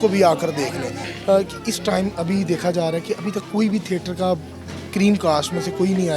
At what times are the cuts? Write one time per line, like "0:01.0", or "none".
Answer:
0:01.0